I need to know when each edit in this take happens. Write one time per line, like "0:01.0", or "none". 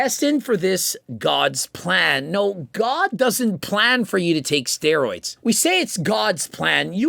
none